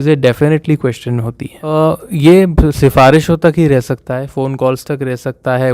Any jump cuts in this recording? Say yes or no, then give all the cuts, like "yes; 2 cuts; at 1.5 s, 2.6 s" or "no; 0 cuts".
yes; 1 cut; at 1.7 s